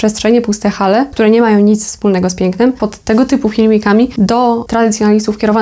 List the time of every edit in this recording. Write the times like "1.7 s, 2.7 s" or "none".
1.1 s, 2.8 s, 4.5 s